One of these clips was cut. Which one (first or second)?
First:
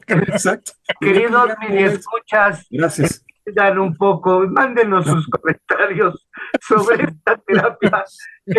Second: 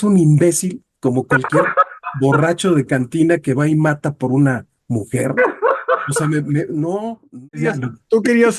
second